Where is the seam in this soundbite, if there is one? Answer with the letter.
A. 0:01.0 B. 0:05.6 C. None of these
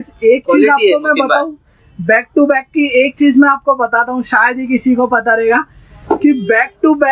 C